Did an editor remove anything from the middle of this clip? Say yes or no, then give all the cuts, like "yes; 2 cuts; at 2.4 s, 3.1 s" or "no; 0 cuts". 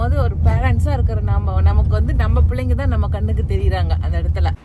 no; 0 cuts